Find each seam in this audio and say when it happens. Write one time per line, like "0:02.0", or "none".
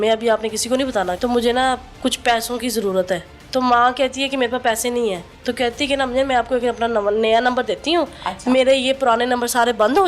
0:01.2
0:03.3
0:05.3